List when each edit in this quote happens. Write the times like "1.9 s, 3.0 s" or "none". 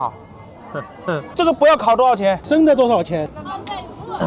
1.3 s, 3.3 s